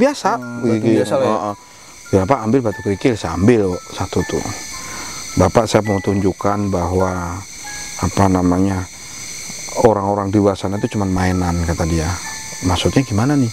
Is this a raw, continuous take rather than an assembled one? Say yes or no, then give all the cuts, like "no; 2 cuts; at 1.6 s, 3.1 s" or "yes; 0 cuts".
yes; 0 cuts